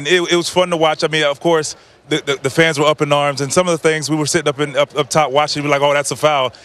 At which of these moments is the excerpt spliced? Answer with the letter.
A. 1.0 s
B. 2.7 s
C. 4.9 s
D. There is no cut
B